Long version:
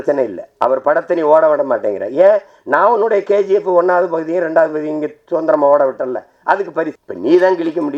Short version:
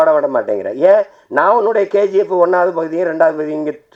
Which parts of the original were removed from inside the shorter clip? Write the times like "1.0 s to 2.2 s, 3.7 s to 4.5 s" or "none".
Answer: none

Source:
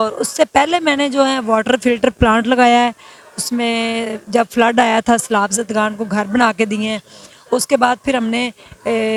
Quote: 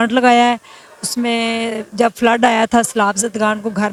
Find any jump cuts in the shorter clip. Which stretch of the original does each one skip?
none

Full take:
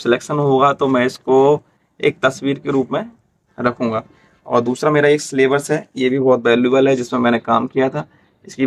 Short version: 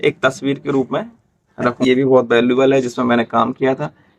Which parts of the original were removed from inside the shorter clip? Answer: 3.8 s to 5.9 s

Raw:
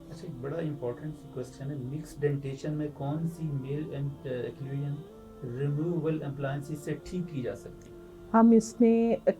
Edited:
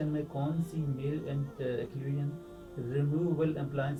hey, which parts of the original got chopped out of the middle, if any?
none

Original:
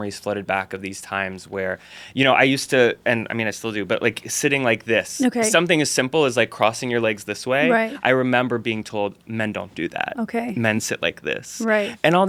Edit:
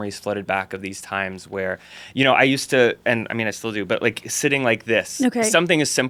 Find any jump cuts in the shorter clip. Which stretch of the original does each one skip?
none

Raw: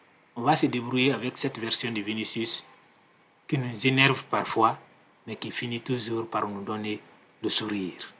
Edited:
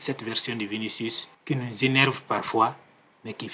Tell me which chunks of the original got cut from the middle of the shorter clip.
2.6 s to 3.3 s

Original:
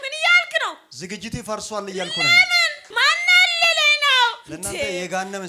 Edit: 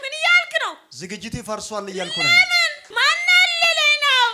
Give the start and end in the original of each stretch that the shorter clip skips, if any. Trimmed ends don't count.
none

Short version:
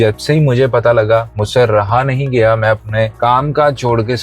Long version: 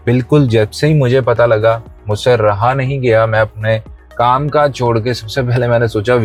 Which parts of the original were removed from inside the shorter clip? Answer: 1.9 s to 2.1 s, 3.8 s to 4.1 s

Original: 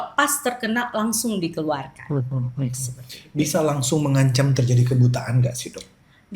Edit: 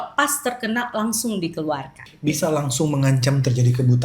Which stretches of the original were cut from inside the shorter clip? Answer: 1.9 s to 3.1 s

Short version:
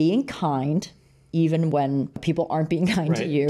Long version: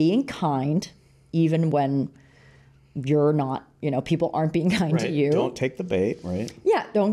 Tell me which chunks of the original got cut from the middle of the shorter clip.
2.2 s to 4.0 s

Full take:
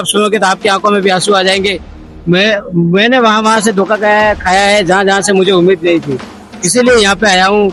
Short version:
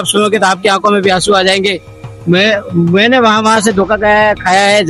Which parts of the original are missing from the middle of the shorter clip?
none

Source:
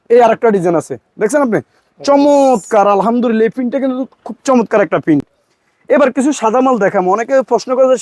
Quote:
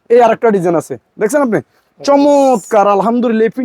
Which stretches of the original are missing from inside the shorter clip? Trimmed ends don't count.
none

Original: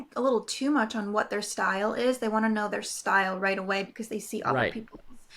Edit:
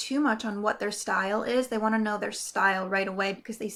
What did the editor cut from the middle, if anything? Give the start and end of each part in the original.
none

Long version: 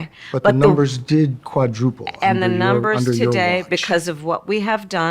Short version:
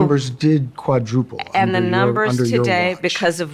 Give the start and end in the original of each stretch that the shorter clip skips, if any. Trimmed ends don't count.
none

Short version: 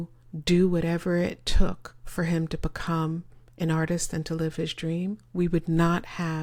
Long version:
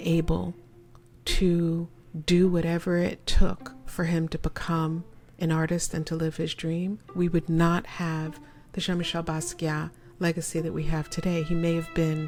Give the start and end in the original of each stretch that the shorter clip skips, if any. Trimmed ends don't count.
none

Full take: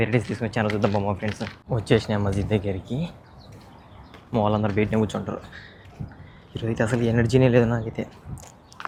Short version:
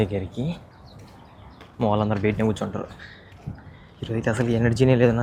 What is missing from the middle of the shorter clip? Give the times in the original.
none

